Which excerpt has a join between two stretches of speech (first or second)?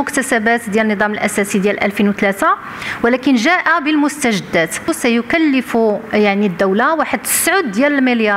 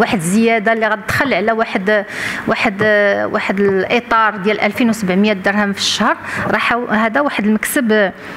first